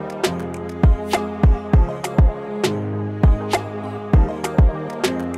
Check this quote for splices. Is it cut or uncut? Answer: uncut